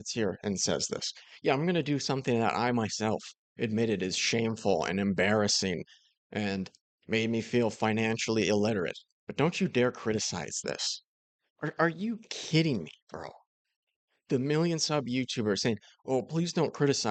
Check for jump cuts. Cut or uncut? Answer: uncut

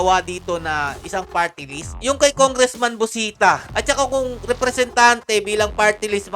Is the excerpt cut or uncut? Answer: cut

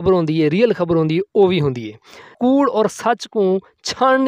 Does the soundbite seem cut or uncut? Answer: cut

